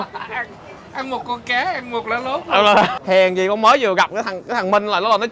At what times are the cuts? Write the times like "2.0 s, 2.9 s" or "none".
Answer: 3.0 s